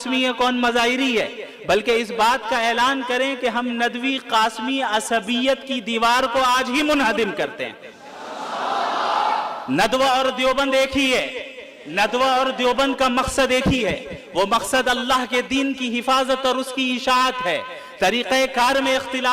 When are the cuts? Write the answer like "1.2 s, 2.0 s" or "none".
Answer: none